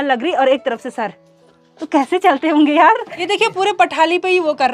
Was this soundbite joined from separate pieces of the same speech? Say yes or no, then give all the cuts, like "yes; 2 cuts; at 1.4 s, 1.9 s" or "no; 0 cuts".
yes; 1 cut; at 3.1 s